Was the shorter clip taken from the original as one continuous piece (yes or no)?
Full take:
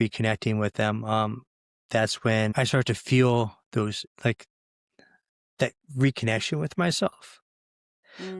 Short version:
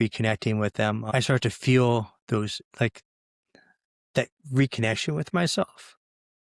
no